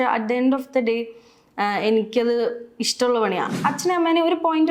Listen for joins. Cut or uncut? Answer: cut